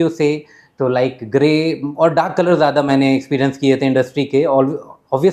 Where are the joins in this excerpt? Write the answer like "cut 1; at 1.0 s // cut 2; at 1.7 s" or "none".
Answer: none